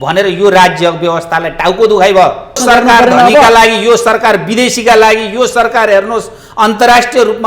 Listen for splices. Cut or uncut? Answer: cut